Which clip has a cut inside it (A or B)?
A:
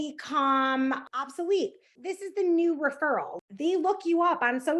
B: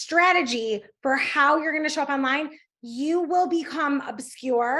A